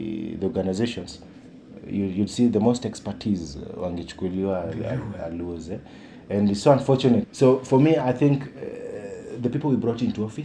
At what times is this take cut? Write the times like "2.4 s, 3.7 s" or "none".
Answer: 7.3 s